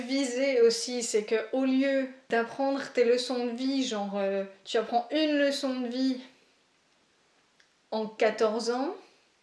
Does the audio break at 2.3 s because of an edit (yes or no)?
yes